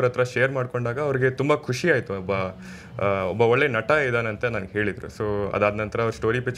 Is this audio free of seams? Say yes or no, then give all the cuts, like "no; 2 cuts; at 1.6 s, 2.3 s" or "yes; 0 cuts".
yes; 0 cuts